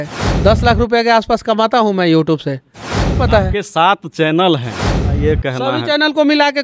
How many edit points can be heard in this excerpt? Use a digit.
2